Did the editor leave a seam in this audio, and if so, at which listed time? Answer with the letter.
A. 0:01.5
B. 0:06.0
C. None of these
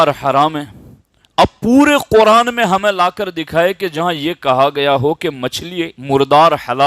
B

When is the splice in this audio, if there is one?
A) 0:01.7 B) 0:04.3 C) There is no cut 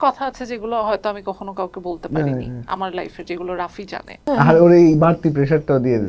B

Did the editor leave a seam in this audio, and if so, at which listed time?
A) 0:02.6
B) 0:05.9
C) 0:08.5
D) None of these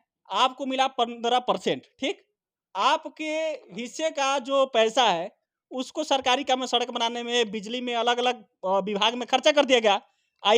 D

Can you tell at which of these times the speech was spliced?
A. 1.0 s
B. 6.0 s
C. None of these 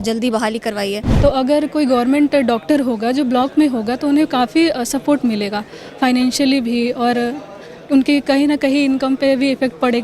A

